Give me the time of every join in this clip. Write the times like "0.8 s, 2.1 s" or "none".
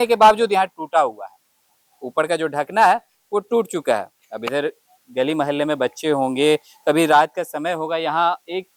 none